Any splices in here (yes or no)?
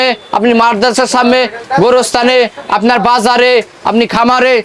no